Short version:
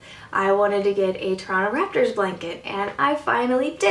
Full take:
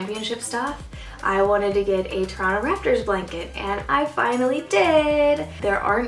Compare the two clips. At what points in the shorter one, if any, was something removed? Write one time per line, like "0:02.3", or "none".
none